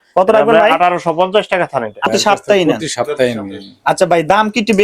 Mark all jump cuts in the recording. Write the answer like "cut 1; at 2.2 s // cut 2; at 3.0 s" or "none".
cut 1; at 2.1 s